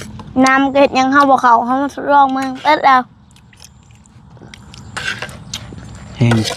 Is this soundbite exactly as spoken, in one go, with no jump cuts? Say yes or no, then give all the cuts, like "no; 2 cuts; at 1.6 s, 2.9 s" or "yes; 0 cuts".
yes; 0 cuts